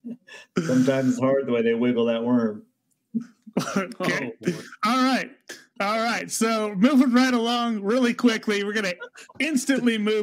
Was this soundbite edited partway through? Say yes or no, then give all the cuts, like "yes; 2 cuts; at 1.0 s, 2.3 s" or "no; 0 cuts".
no; 0 cuts